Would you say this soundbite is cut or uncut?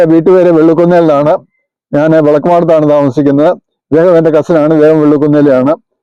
uncut